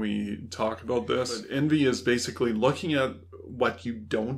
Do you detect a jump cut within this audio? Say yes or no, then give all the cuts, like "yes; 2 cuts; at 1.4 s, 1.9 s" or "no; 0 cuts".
yes; 1 cut; at 1.4 s